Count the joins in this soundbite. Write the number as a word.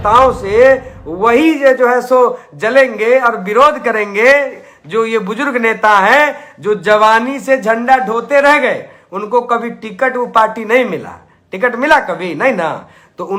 zero